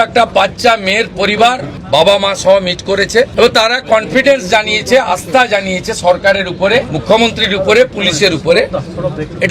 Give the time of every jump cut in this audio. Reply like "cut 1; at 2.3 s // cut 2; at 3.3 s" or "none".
cut 1; at 1.7 s // cut 2; at 3.3 s // cut 3; at 6.9 s